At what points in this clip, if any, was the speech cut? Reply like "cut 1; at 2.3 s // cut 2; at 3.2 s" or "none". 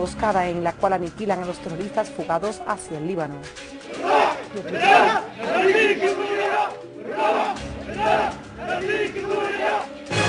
none